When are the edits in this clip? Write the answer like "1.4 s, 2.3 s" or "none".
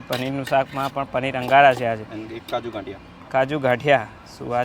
none